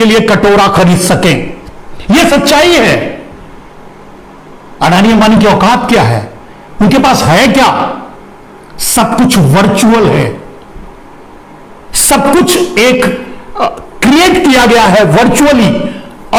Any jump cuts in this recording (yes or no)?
no